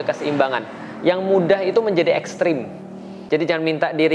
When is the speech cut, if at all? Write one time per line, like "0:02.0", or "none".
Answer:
0:03.1